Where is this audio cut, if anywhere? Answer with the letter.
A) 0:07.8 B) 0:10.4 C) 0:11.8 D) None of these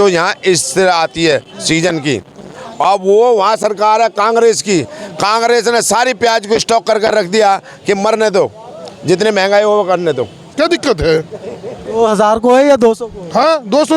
B